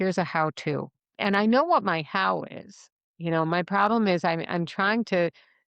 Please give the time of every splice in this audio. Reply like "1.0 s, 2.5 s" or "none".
1.0 s